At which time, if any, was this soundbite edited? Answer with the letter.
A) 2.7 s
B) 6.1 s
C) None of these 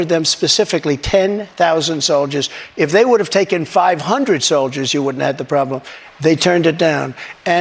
C